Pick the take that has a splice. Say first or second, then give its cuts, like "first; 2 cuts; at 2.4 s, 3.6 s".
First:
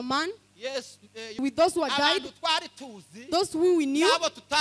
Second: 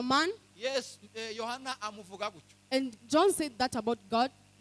first; 1 cut; at 1.4 s